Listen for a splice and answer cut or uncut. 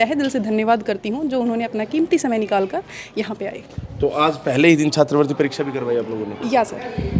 uncut